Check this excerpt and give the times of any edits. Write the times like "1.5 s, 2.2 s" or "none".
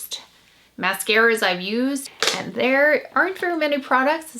2.1 s

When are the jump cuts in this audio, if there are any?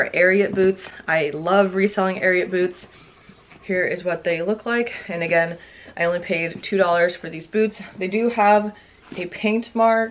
none

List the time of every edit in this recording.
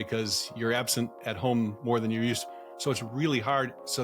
none

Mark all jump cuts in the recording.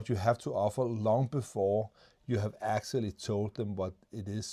none

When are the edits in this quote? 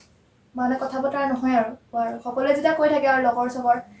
1.9 s

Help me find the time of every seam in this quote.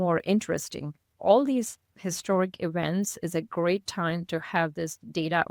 1.2 s

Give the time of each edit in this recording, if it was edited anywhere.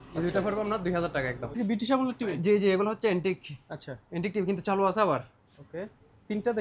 1.4 s

